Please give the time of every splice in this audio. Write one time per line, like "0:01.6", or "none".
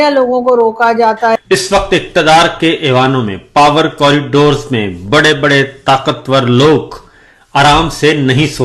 0:01.3